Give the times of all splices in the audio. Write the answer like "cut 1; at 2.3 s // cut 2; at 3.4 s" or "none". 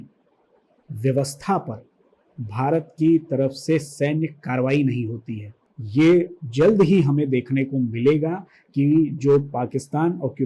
cut 1; at 5.7 s

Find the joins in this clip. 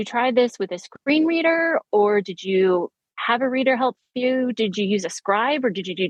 none

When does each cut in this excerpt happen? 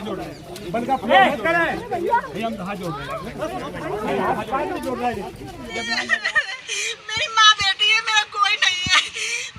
cut 1; at 6.1 s

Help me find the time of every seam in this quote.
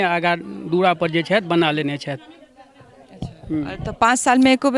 none

